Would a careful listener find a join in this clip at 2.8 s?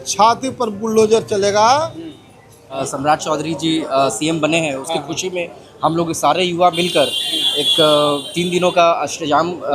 yes; 1 cut; at 2.8 s

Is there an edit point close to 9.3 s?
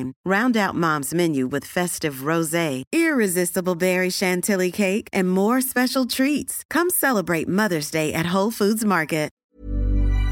yes; 1 cut; at 9.3 s

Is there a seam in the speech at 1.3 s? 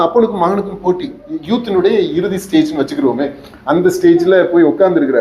yes; 1 cut; at 1.3 s

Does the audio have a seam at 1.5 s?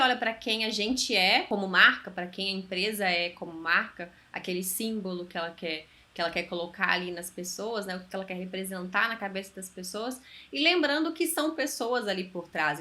yes; 1 cut; at 1.5 s

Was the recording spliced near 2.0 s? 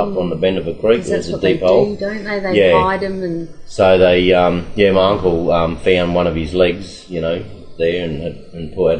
no; 0 cuts

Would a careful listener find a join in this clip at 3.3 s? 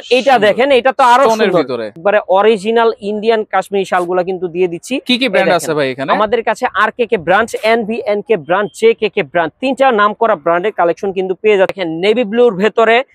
no; 2 cuts; at 1.9 s, 11.7 s

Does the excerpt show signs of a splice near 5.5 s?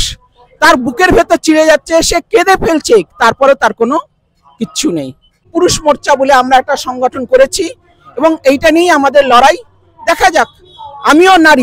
yes; 1 cut; at 5.5 s

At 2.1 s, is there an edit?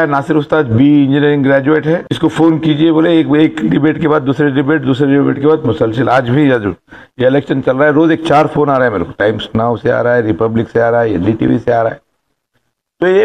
yes; 1 cut; at 2.1 s

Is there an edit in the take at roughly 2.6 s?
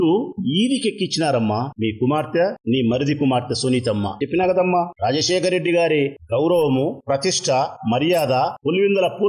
no; 0 cuts

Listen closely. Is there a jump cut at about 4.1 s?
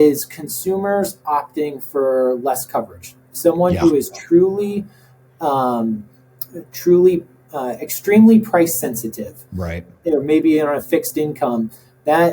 no; 0 cuts

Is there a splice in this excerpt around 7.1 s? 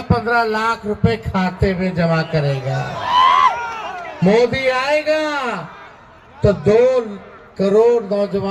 no; 0 cuts

